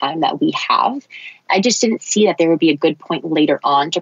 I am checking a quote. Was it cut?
yes; 1 cut; at 1.4 s

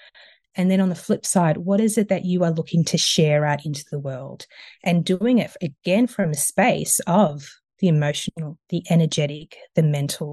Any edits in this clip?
no; 0 cuts

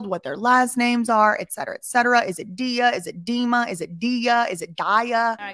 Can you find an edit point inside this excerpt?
no; 0 cuts

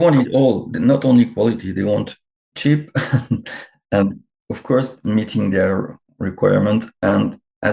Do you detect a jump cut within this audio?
no; 0 cuts

